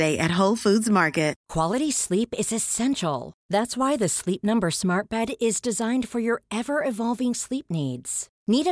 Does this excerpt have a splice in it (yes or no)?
yes